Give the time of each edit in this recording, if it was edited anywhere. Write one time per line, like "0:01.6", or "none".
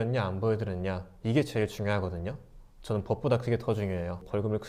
none